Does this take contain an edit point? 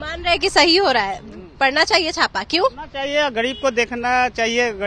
no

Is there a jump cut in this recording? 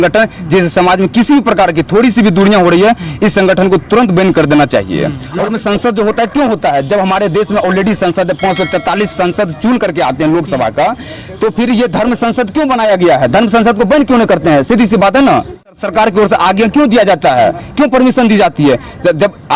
yes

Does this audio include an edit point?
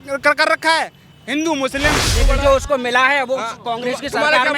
yes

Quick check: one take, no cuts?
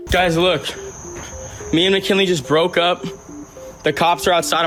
yes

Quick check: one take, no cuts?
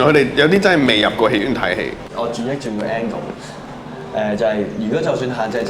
no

